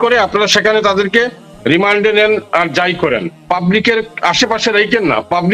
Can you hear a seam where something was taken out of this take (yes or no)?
no